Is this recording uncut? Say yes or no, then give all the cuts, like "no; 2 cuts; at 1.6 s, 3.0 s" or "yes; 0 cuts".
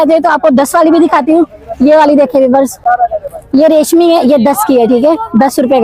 yes; 0 cuts